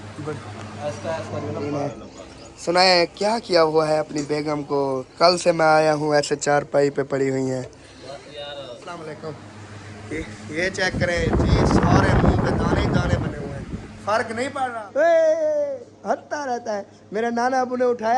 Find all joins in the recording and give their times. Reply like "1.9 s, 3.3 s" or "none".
1.7 s, 9.0 s, 14.6 s